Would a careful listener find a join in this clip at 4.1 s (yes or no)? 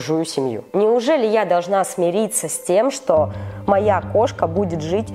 no